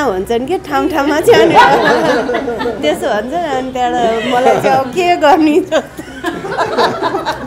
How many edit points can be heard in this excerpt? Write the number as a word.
zero